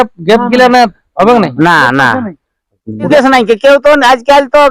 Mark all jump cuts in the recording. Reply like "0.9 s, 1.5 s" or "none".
3.1 s